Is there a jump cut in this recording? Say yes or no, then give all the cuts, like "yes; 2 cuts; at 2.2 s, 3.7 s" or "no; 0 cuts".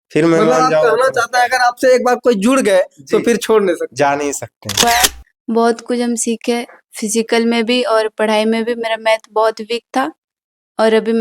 yes; 1 cut; at 4.8 s